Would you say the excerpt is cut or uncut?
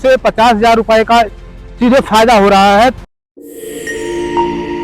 cut